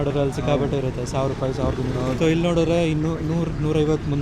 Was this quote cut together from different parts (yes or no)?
yes